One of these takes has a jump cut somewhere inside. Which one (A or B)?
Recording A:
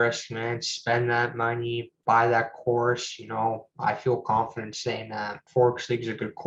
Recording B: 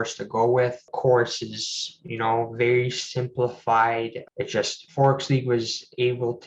B